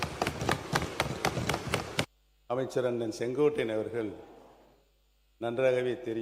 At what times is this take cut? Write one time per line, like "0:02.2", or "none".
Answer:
0:02.2

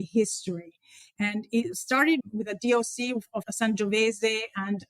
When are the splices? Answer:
0:02.2
0:03.5

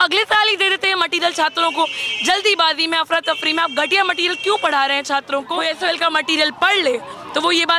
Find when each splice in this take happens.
0:05.5

